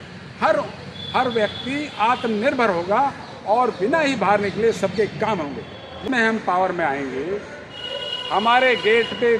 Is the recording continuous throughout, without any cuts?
no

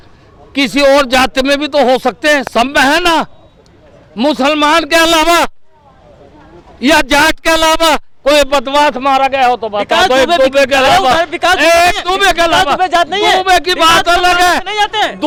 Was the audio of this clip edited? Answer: no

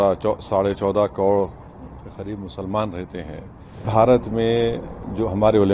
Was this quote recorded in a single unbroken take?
no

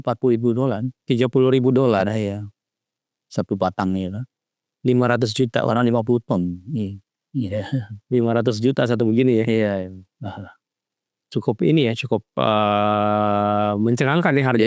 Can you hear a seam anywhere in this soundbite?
no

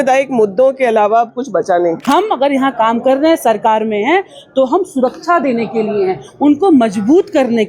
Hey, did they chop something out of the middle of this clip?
yes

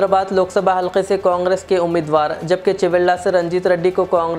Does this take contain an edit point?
no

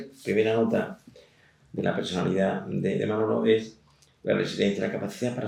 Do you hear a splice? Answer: no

